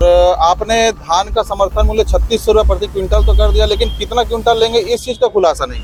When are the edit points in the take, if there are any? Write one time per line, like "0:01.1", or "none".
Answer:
none